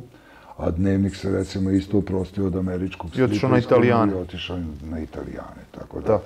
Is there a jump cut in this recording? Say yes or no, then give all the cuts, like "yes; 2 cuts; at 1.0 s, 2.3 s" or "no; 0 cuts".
no; 0 cuts